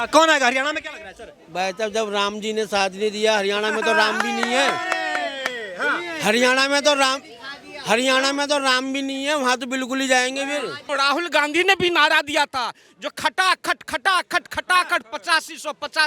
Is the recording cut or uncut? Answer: cut